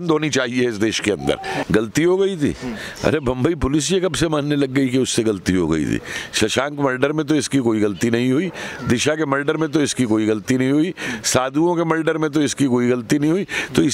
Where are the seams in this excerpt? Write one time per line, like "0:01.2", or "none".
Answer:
0:01.6